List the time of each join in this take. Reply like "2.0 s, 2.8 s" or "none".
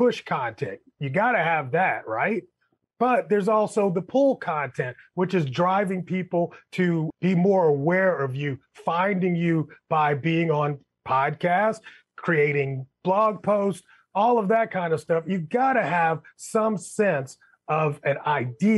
none